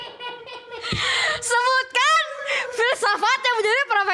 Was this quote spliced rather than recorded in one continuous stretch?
no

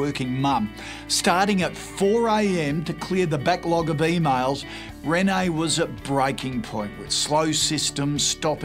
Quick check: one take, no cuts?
no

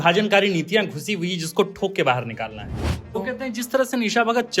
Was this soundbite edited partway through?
yes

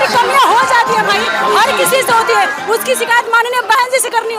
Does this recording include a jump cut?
no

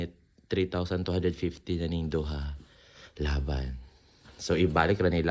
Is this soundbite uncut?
yes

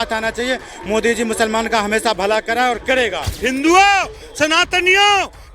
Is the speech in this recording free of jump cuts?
no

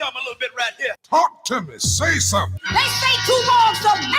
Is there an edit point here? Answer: yes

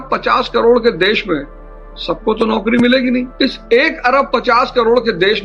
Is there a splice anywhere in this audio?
no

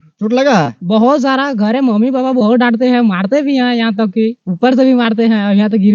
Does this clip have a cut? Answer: no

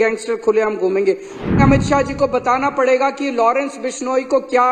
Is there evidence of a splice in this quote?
yes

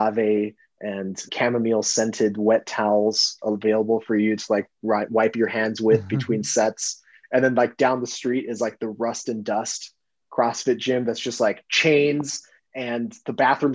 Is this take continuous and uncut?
no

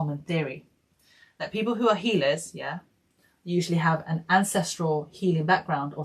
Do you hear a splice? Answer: no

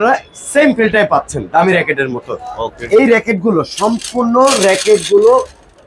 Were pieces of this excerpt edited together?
no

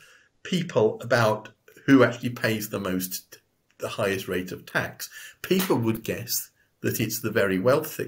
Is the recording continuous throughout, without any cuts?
yes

